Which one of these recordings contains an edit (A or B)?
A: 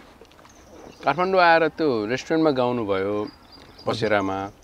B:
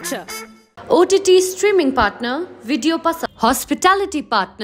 B